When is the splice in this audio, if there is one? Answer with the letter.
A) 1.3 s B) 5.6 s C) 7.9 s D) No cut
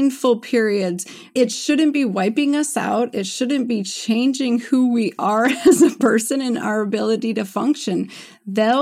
A